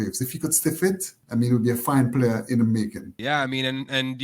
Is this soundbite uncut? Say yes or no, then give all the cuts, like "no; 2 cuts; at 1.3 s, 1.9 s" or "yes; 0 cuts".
yes; 0 cuts